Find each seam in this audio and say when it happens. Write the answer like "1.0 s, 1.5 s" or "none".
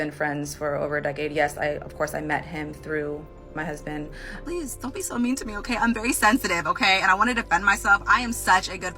4.4 s